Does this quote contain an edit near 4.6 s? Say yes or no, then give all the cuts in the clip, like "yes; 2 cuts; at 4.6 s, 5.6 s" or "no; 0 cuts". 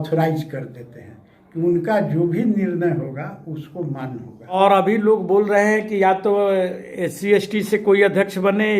yes; 1 cut; at 4.6 s